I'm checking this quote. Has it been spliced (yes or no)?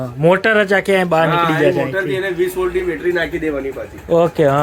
no